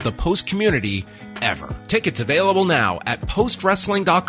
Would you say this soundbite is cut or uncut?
cut